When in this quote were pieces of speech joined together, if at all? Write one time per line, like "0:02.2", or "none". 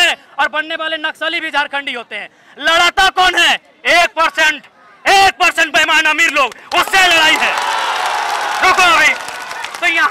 none